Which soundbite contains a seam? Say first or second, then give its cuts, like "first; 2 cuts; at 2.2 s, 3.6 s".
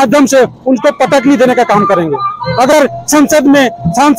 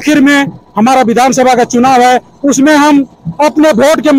first; 1 cut; at 2.7 s